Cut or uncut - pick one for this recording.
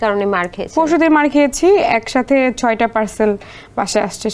uncut